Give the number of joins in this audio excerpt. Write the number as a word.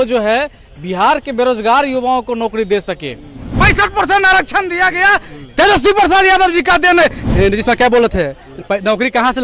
two